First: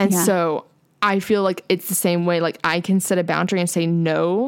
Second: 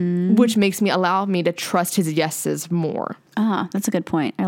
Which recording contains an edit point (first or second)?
second